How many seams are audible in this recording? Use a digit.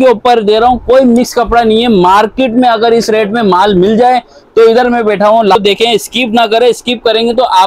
1